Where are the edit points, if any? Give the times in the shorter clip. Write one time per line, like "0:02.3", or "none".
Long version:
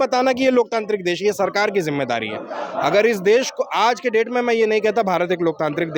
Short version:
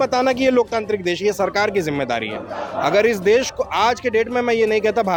none